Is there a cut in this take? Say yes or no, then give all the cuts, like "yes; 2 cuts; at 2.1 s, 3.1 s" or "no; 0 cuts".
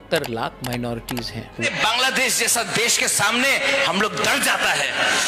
yes; 1 cut; at 1.5 s